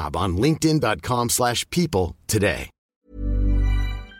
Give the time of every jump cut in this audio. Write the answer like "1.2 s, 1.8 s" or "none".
2.9 s